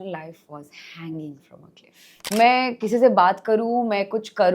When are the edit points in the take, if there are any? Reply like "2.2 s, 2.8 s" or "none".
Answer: 2.1 s